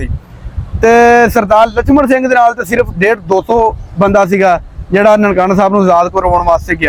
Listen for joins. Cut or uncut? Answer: uncut